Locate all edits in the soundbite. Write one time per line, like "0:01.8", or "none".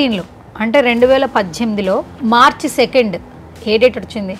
none